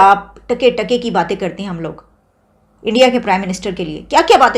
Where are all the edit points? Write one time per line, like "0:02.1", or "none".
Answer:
none